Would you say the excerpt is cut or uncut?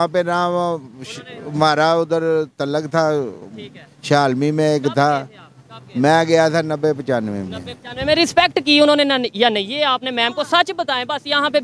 uncut